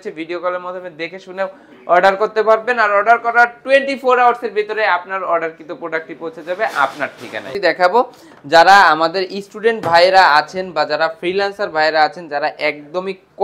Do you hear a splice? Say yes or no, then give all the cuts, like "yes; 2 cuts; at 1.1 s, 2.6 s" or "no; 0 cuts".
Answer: no; 0 cuts